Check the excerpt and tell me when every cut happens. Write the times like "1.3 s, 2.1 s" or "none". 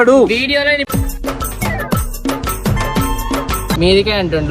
3.6 s